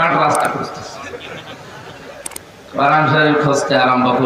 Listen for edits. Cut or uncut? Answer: uncut